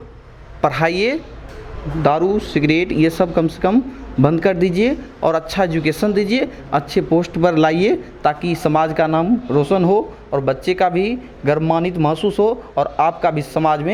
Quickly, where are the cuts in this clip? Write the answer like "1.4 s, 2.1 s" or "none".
none